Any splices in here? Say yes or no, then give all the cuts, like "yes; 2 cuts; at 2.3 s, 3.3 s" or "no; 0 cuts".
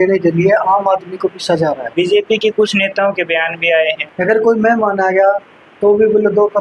yes; 2 cuts; at 1.9 s, 4.0 s